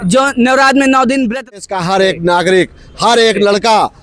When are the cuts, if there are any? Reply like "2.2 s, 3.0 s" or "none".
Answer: 1.6 s

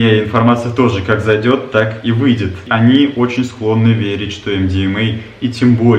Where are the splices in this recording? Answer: 2.7 s

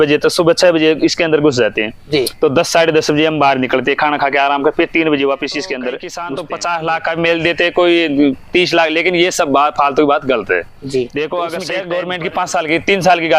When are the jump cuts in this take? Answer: 6.2 s, 11.8 s

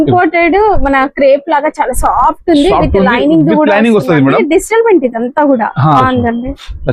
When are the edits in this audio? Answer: 6.0 s

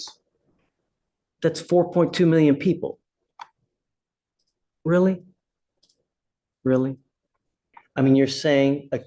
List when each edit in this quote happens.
7.7 s

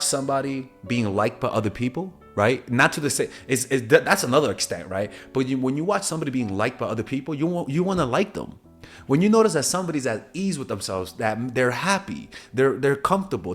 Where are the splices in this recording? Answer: none

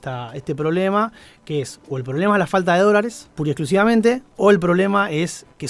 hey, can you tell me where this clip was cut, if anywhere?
3.2 s, 4.3 s

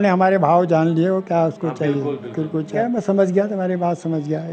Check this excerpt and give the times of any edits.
2.8 s

